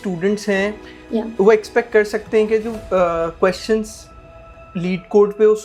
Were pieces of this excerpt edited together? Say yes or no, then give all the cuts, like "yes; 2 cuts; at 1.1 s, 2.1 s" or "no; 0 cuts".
no; 0 cuts